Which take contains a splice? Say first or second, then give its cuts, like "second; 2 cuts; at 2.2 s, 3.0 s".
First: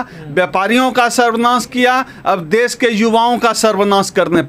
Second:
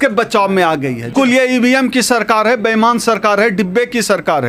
second; 1 cut; at 1.1 s